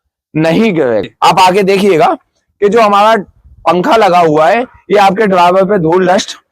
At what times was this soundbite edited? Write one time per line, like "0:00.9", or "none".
0:01.1